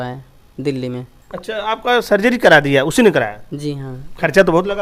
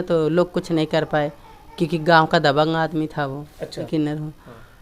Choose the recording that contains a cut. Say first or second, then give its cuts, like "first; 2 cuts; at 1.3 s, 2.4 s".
second; 1 cut; at 3.9 s